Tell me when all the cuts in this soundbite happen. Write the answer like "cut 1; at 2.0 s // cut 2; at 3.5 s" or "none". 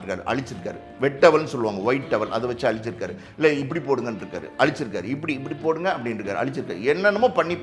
none